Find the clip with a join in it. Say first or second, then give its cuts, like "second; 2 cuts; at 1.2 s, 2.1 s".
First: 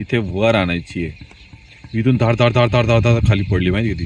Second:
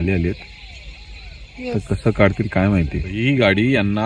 second; 1 cut; at 3.0 s